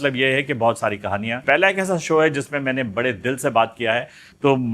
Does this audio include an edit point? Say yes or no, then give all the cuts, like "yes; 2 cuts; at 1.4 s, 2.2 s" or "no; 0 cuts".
yes; 1 cut; at 1.4 s